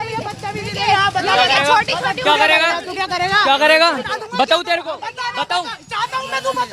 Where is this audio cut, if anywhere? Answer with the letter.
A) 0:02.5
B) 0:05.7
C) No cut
C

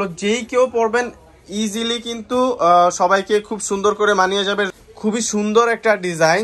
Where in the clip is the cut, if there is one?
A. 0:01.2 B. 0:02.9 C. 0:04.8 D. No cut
C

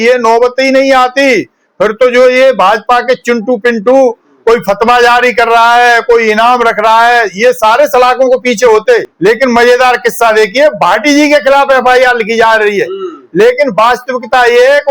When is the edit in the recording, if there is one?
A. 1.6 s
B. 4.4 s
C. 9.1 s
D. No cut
C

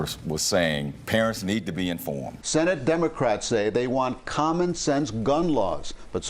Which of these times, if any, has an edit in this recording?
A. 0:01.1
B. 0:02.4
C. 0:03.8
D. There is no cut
B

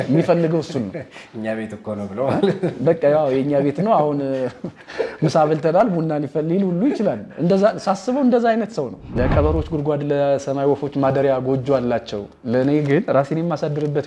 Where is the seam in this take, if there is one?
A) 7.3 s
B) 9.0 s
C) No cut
B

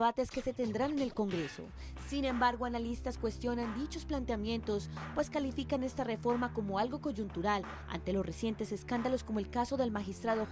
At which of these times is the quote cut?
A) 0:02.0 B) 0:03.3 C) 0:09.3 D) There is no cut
B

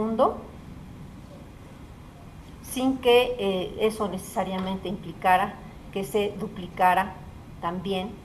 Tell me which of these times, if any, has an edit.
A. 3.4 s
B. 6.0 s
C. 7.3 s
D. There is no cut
A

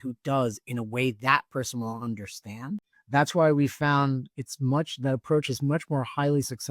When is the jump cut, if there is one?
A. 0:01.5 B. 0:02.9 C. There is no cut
B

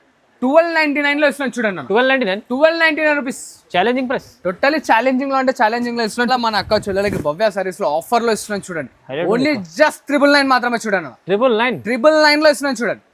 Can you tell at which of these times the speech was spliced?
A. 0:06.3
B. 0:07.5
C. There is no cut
A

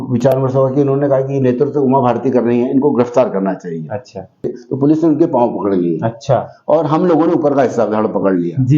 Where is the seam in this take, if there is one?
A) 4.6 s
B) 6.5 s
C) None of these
A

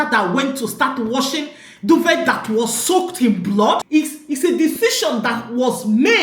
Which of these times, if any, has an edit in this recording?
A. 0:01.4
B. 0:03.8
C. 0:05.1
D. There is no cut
B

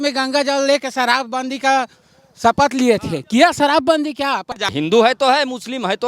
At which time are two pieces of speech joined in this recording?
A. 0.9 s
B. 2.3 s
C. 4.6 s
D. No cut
C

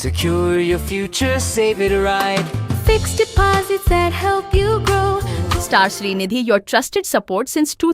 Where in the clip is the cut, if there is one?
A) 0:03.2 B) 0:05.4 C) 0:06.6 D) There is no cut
B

